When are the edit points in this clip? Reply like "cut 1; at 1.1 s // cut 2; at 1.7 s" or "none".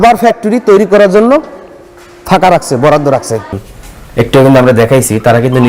cut 1; at 3.6 s